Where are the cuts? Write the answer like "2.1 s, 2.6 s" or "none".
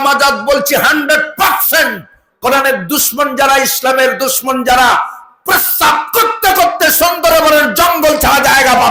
none